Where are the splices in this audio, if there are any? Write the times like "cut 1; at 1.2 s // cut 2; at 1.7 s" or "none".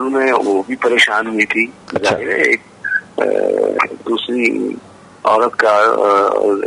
none